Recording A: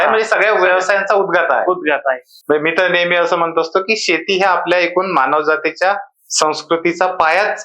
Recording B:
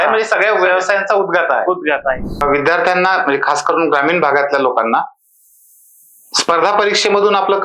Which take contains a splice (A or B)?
B